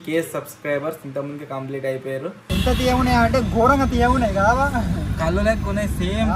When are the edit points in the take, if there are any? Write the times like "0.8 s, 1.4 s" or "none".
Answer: 2.5 s